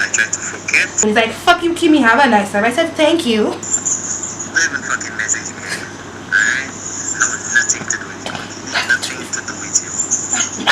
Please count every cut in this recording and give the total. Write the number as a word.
two